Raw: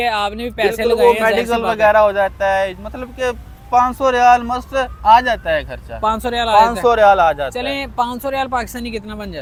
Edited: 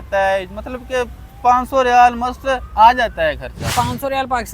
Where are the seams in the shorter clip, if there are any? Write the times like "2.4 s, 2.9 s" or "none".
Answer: 3.6 s